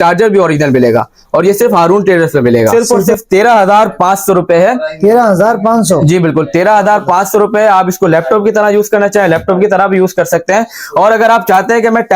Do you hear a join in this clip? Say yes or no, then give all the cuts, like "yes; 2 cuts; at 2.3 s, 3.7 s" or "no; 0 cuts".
yes; 1 cut; at 2.7 s